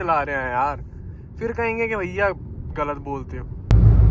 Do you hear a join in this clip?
no; 0 cuts

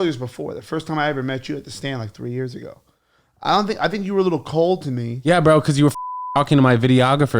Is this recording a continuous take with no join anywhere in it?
yes; 0 cuts

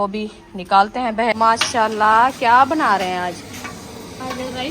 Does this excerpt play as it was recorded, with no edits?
no; 1 cut; at 1.3 s

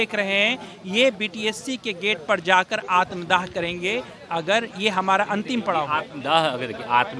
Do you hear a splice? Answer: no; 0 cuts

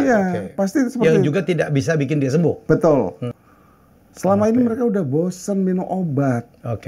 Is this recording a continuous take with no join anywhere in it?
no; 1 cut; at 3.3 s

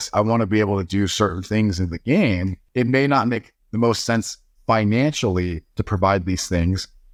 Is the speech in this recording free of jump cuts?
yes; 0 cuts

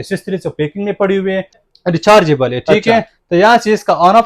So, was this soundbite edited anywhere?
yes; 1 cut; at 1.6 s

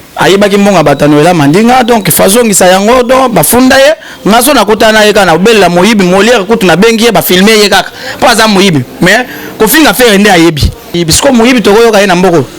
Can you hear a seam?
yes; 1 cut; at 11.0 s

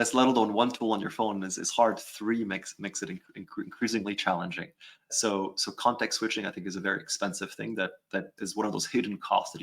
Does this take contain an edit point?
yes; 1 cut; at 8.3 s

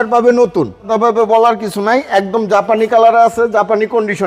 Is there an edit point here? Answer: yes; 1 cut; at 0.9 s

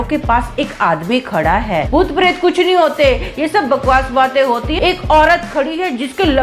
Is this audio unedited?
no; 2 cuts; at 1.9 s, 4.7 s

